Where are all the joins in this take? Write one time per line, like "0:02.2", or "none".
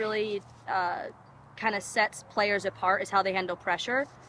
none